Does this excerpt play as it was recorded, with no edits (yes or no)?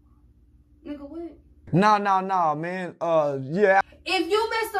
no